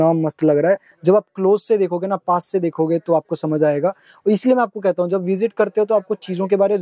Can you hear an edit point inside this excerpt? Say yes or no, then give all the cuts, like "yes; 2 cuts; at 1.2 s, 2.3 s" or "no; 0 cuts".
yes; 1 cut; at 0.9 s